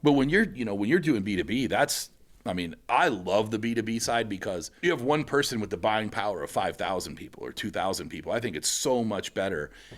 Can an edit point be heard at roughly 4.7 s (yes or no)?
yes